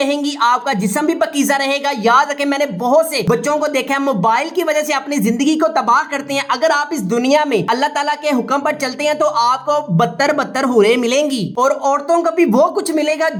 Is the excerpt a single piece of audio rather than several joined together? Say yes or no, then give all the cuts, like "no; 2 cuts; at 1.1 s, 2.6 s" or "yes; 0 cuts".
yes; 0 cuts